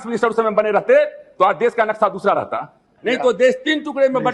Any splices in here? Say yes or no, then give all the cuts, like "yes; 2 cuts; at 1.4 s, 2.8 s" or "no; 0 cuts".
yes; 1 cut; at 2.9 s